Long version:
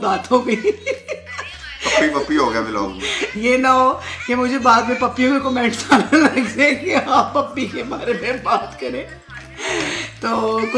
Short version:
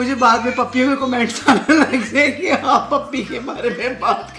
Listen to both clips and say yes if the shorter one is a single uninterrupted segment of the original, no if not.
yes